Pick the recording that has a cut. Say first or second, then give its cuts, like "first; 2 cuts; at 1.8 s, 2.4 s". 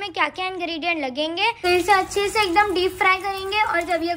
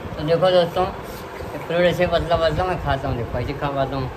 first; 1 cut; at 1.6 s